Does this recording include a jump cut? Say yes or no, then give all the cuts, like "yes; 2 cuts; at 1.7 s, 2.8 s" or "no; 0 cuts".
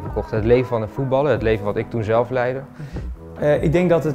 yes; 1 cut; at 3.2 s